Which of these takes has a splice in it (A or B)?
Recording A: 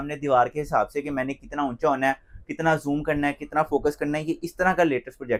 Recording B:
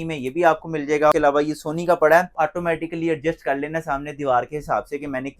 B